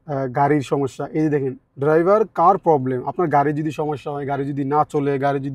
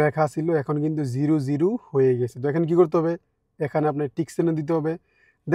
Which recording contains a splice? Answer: first; 1 cut; at 1.6 s

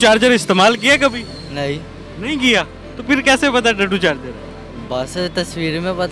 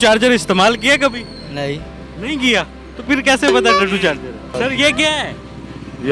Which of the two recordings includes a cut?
second; 1 cut; at 4.5 s

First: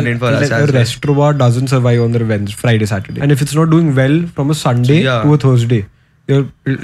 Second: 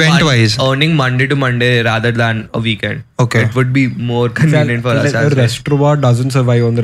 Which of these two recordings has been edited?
first; 1 cut; at 3.2 s

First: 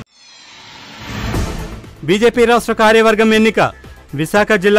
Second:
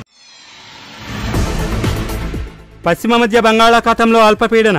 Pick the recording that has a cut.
first; 1 cut; at 1.3 s

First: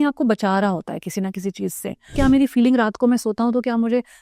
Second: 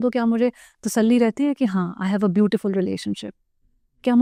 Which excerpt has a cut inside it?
first; 1 cut; at 2.1 s

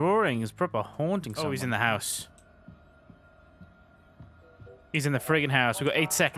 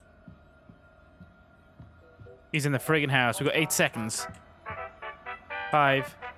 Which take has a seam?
first; 1 cut; at 1.4 s

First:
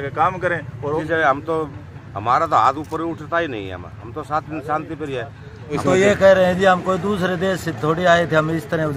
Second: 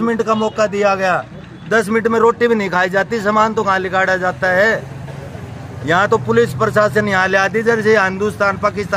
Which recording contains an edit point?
first; 2 cuts; at 1.0 s, 5.8 s

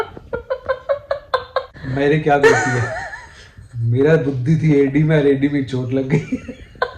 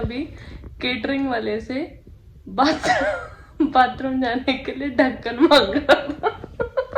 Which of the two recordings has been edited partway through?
first; 1 cut; at 1.7 s

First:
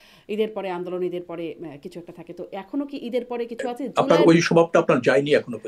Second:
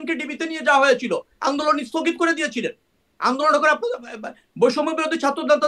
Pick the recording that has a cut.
first; 1 cut; at 3.8 s

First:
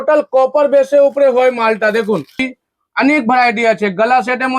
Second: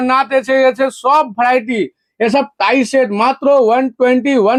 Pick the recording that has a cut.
first; 1 cut; at 2.4 s

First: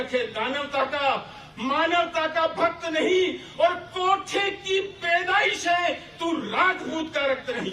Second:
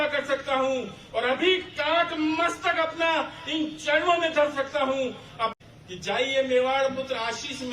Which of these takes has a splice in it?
second; 1 cut; at 5.5 s

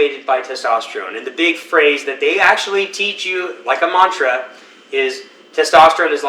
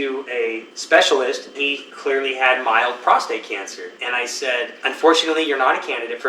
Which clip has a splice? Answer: second; 3 cuts; at 1.6 s, 3.9 s, 4.7 s

